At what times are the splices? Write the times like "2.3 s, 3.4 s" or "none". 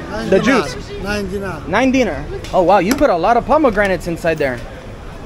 2.3 s

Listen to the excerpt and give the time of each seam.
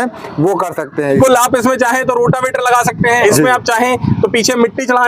1.1 s, 3.2 s

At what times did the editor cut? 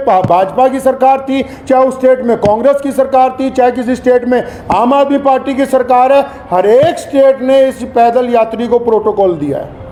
none

